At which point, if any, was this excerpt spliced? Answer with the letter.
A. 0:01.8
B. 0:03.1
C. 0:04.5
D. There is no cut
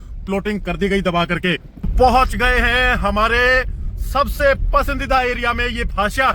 A